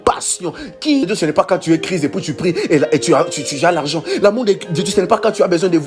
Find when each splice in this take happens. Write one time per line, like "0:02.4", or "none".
0:01.1